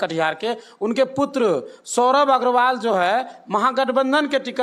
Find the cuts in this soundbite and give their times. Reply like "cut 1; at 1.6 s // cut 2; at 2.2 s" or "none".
none